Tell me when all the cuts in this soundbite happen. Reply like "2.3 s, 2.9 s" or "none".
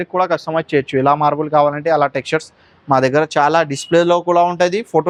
none